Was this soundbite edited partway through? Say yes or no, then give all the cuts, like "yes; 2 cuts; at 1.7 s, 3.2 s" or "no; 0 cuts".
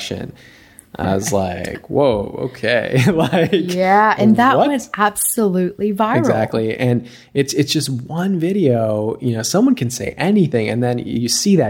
yes; 1 cut; at 6.3 s